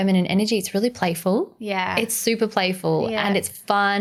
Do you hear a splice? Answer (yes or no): no